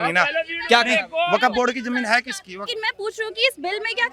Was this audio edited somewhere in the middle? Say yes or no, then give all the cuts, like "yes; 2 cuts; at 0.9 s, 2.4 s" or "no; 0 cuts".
yes; 1 cut; at 2.7 s